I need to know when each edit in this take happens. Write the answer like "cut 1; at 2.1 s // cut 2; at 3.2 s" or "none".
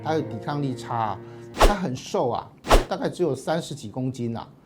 cut 1; at 1.5 s